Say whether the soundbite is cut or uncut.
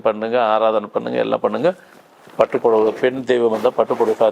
uncut